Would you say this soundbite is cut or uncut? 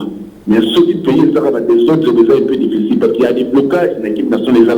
uncut